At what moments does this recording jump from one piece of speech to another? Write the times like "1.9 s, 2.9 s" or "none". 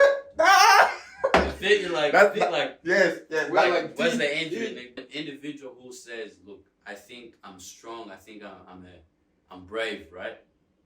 5.1 s